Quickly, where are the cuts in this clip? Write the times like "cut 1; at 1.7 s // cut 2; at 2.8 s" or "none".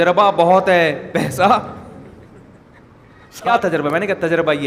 cut 1; at 3.5 s

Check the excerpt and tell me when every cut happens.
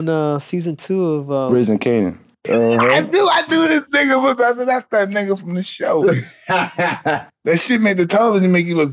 cut 1; at 2.5 s

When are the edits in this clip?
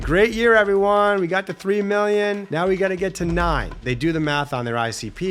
cut 1; at 2.4 s // cut 2; at 3.8 s

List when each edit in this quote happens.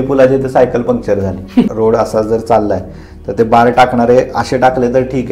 cut 1; at 1.7 s

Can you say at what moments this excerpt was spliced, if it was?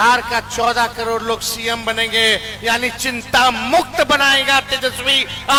none

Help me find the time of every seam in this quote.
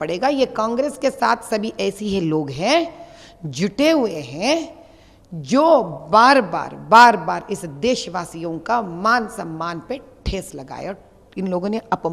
none

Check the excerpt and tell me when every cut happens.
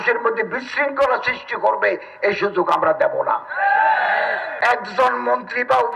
cut 1; at 4.5 s

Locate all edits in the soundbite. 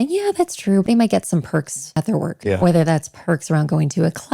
cut 1; at 0.8 s // cut 2; at 2.1 s

